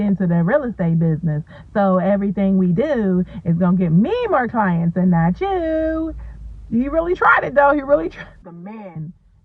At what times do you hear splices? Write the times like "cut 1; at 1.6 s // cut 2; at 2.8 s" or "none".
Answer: cut 1; at 8.3 s

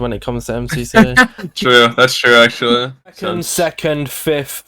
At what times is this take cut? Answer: cut 1; at 1.4 s // cut 2; at 3.2 s

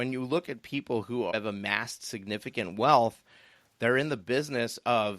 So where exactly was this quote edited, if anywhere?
cut 1; at 1.3 s

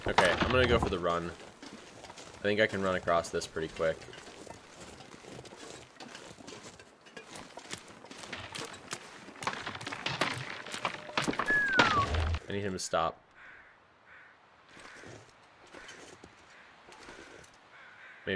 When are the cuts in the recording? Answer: cut 1; at 12.3 s

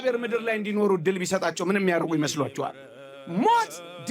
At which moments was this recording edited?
cut 1; at 2.9 s

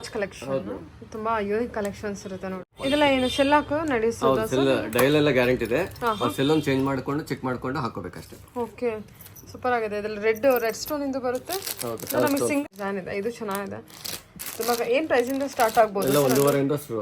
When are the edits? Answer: cut 1; at 2.7 s // cut 2; at 12.6 s

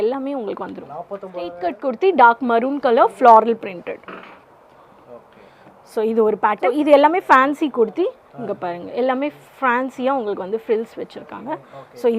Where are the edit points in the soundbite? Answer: cut 1; at 1.7 s // cut 2; at 6.7 s

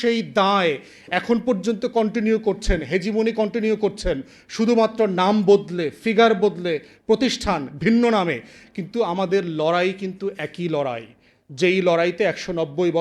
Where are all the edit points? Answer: none

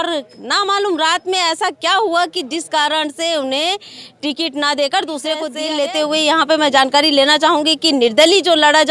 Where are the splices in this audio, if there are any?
cut 1; at 5.6 s

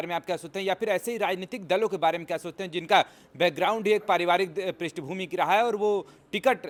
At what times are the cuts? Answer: none

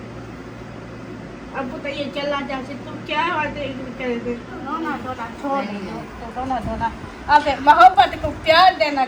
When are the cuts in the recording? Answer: cut 1; at 4.7 s

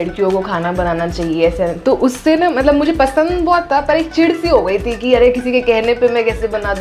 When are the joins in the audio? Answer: none

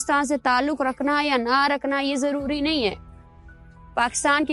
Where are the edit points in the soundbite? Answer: none

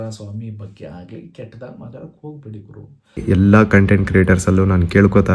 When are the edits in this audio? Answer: cut 1; at 3.2 s

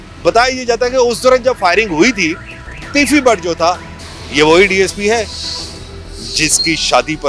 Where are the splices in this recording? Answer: cut 1; at 3.9 s

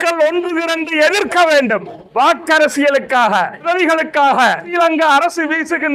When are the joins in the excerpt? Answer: cut 1; at 2.0 s // cut 2; at 3.7 s // cut 3; at 4.7 s

